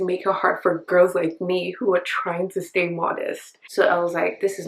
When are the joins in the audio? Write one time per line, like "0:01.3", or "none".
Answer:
0:03.5